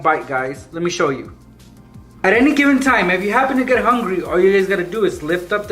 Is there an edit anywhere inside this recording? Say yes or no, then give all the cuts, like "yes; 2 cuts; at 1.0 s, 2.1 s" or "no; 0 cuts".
yes; 1 cut; at 2.1 s